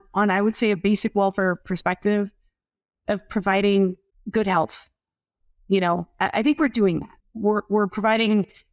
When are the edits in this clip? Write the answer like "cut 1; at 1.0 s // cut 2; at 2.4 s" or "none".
cut 1; at 4.1 s // cut 2; at 7.1 s